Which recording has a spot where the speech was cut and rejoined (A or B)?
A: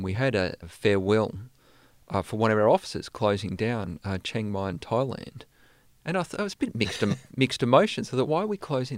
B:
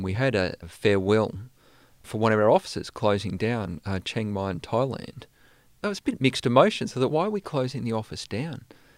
B